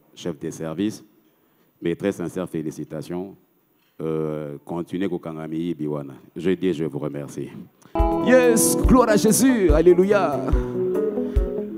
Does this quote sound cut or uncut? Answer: cut